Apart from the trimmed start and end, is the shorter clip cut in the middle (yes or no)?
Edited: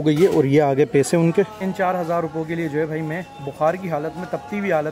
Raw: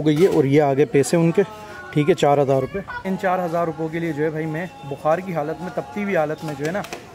yes